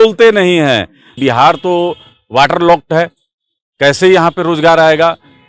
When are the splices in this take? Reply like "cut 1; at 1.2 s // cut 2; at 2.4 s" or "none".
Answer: cut 1; at 1.1 s